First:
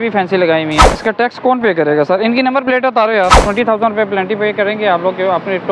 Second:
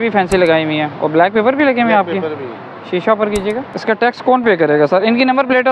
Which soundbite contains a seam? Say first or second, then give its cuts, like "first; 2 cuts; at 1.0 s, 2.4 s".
first; 2 cuts; at 0.9 s, 3.4 s